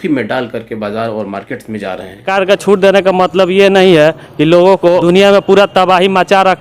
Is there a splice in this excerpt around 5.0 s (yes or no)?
yes